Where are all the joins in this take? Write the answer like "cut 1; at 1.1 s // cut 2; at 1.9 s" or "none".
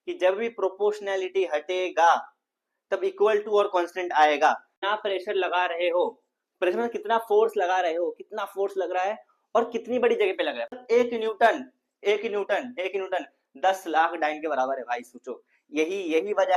cut 1; at 4.8 s // cut 2; at 10.7 s